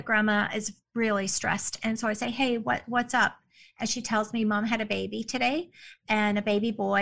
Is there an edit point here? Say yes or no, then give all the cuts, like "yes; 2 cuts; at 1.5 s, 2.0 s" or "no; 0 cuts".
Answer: no; 0 cuts